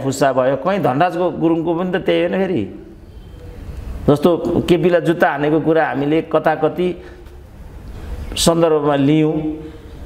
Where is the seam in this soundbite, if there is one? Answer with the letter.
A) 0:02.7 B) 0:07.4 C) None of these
C